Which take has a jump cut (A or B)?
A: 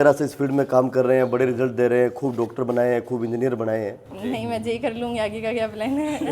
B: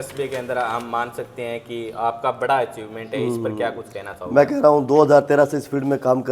A